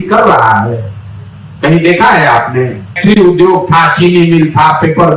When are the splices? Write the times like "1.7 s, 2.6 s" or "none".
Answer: 3.0 s